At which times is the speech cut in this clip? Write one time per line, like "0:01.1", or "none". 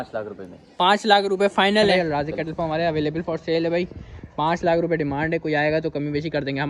0:01.9